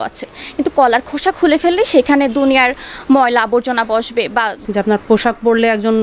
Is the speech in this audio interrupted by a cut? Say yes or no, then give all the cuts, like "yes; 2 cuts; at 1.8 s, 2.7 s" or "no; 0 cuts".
yes; 1 cut; at 4.6 s